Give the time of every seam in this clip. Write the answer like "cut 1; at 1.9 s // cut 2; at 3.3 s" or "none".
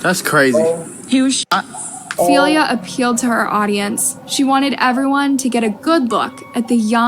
cut 1; at 2.2 s